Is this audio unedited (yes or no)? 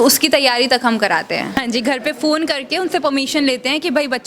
no